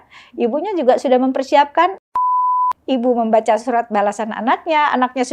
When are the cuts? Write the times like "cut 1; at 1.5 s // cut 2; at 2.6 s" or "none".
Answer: cut 1; at 2.4 s